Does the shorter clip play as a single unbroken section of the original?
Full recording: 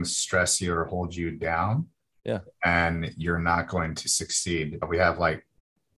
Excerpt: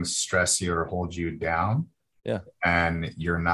yes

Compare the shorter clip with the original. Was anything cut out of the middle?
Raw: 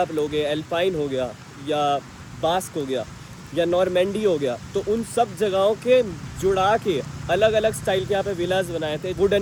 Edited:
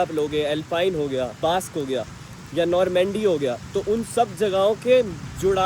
yes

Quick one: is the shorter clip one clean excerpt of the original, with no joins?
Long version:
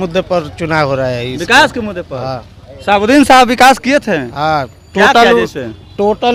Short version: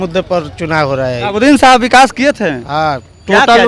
no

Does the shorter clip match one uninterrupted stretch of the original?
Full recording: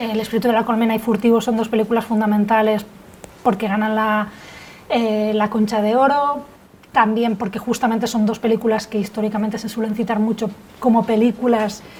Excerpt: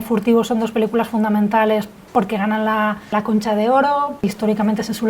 no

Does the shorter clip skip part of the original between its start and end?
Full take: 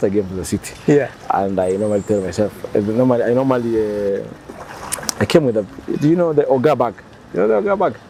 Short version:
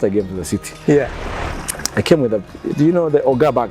yes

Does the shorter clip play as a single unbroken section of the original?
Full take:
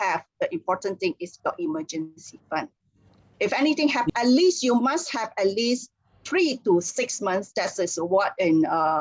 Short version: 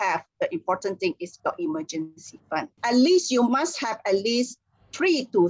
no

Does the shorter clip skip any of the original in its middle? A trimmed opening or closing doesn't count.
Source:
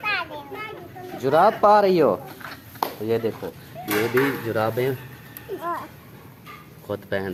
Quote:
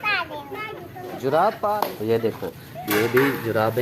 yes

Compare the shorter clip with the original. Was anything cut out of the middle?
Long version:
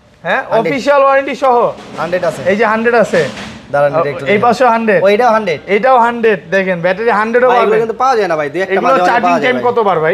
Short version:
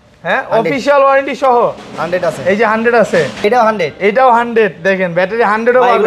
yes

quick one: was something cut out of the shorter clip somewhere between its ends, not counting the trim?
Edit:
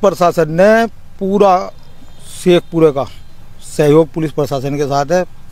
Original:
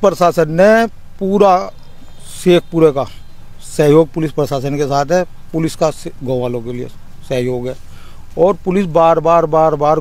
no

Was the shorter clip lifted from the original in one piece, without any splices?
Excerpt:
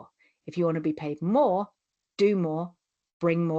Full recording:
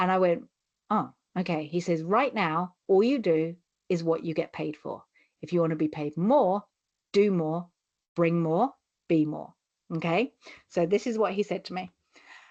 yes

